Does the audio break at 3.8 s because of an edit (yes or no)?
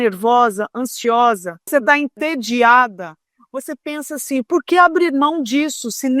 no